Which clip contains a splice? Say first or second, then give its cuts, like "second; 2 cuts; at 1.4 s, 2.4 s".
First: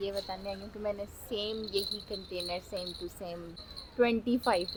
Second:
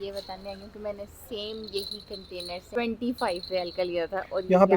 second; 1 cut; at 2.8 s